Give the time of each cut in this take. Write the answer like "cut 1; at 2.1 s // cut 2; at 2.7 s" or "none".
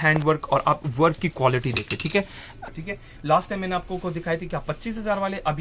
cut 1; at 2.5 s